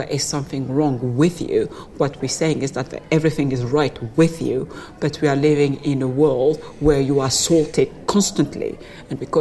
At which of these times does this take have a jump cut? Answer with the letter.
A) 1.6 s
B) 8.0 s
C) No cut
C